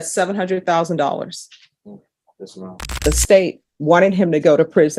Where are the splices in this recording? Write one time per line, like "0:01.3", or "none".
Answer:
0:03.0